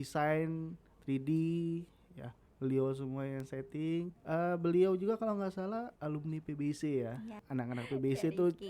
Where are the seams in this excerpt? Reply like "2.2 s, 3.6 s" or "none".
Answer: 4.2 s, 5.9 s, 7.4 s

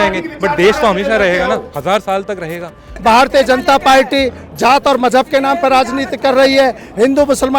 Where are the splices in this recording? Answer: 2.9 s

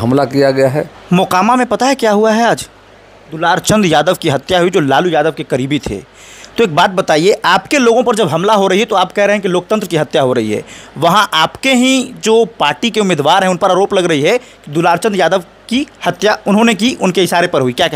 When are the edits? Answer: 0.9 s

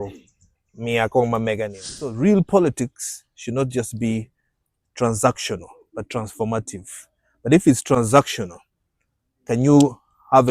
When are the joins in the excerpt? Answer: 2.1 s

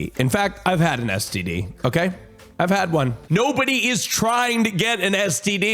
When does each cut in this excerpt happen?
3.2 s

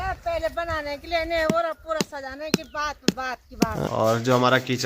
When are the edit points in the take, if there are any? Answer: 3.8 s

